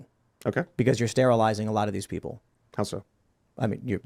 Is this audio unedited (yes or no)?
yes